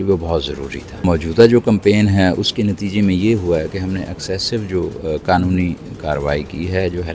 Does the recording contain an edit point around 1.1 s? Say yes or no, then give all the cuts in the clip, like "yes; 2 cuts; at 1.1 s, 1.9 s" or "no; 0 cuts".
yes; 1 cut; at 1.1 s